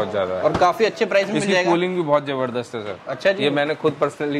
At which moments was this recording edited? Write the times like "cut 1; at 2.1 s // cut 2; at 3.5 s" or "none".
none